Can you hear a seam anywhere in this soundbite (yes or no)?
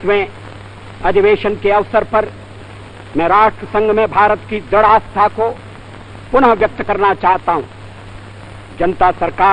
yes